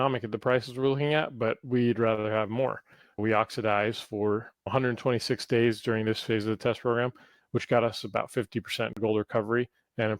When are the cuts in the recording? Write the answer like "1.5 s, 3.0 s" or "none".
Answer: 3.2 s